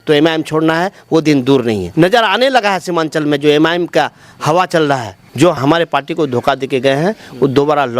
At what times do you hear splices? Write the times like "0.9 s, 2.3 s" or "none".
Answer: 1.9 s, 5.2 s